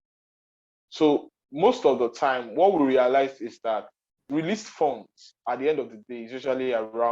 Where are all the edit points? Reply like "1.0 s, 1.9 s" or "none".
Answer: 4.2 s

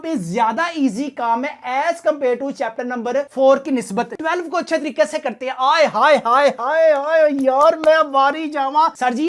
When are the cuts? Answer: 4.2 s

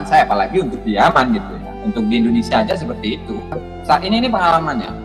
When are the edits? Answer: 3.7 s

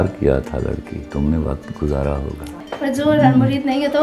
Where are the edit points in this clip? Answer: 1.0 s, 2.4 s

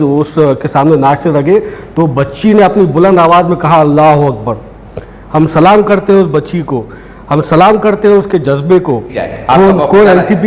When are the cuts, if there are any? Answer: 9.2 s

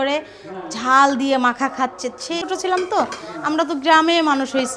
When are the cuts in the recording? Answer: 2.4 s

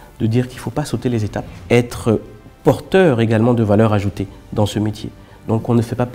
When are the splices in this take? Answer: 1.5 s

